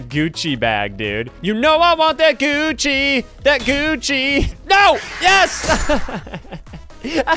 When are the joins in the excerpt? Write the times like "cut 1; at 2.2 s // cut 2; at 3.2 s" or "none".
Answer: cut 1; at 4.5 s